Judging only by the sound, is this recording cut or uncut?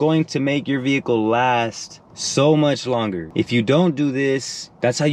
uncut